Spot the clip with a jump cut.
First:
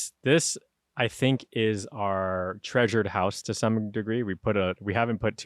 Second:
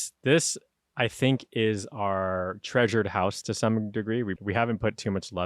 second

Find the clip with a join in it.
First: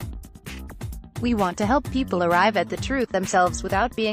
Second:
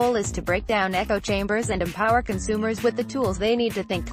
first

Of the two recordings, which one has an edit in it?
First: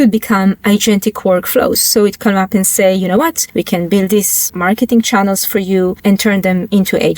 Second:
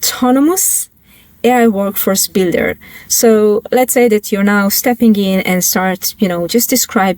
first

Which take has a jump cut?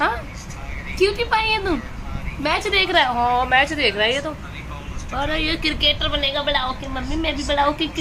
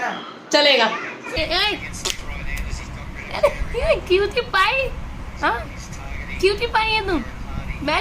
second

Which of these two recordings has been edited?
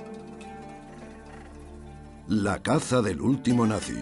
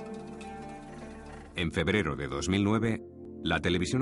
second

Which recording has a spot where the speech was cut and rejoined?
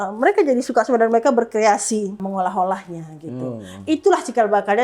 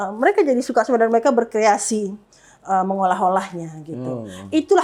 first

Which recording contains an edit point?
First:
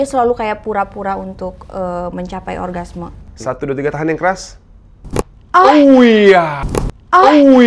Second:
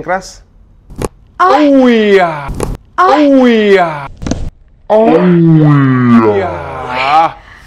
first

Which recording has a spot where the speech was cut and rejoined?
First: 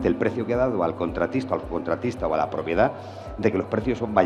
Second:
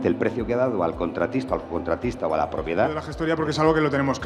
second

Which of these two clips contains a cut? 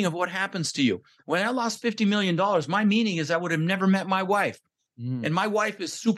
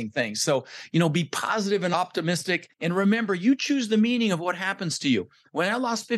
second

